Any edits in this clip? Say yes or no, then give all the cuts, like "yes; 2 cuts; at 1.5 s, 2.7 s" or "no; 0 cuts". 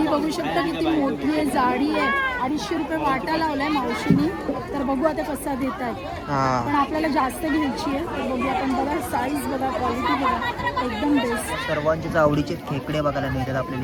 no; 0 cuts